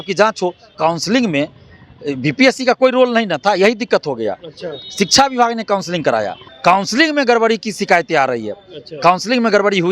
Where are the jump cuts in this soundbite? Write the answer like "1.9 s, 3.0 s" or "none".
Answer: 0.8 s, 6.4 s